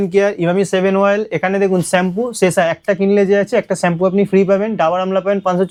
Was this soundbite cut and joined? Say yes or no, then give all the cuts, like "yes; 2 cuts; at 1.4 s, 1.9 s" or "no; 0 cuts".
no; 0 cuts